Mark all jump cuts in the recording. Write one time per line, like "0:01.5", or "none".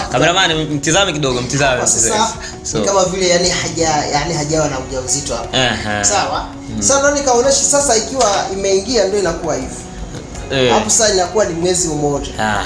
none